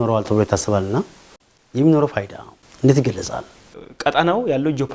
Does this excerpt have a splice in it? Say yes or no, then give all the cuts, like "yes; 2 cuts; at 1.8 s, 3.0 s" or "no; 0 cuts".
yes; 1 cut; at 3.8 s